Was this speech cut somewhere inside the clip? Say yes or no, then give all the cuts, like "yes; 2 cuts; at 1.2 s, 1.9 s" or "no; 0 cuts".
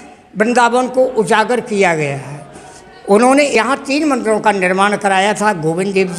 yes; 1 cut; at 3.5 s